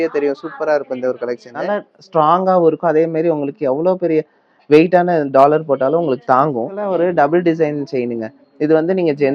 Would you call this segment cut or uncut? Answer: cut